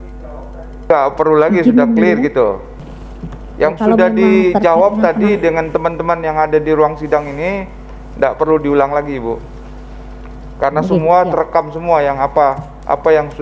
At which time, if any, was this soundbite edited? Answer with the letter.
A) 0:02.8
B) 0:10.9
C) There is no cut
A